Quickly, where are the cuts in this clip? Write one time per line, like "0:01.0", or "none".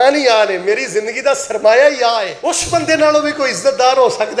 0:02.3